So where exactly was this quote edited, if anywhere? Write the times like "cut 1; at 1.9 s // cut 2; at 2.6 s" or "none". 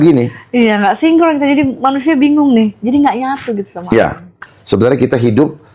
cut 1; at 4.4 s